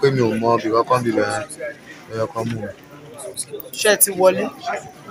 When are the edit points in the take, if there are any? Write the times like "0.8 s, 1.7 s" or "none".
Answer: none